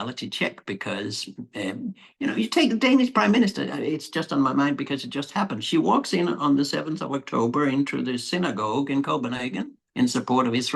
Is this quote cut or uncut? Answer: uncut